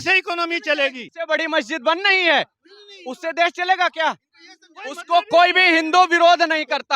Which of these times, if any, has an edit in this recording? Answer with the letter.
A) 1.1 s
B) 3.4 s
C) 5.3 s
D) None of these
A